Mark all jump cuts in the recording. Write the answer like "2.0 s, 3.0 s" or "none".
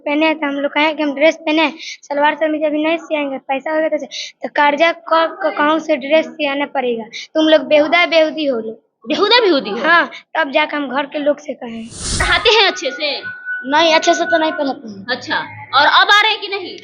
12.2 s